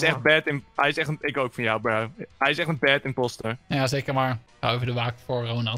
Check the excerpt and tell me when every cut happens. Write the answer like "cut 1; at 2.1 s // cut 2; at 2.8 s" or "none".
cut 1; at 4.5 s